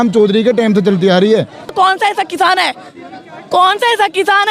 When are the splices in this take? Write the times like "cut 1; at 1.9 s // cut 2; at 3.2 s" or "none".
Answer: cut 1; at 1.7 s

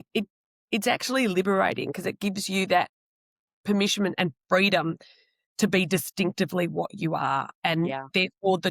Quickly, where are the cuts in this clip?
none

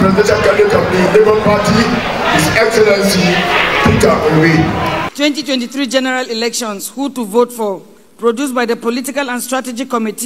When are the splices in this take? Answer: cut 1; at 5.1 s

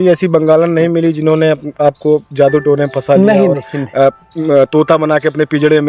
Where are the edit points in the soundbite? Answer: none

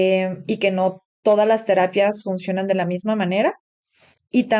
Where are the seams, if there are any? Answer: none

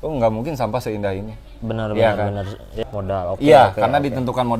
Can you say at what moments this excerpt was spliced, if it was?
cut 1; at 2.7 s

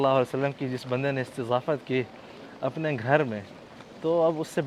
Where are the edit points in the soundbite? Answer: none

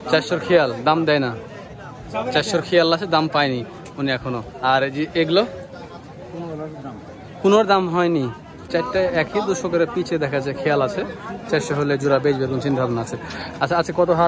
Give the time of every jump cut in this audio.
cut 1; at 8.7 s

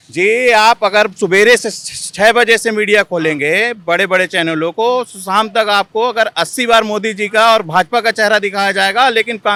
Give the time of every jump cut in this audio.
none

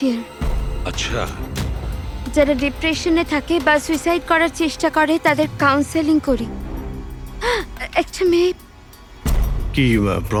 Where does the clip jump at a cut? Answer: none

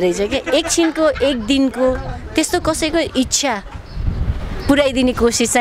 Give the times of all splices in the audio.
none

